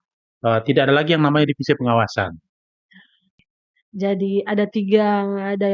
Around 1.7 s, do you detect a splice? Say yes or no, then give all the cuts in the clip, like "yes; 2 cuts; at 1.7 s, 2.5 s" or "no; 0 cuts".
no; 1 cut; at 3.5 s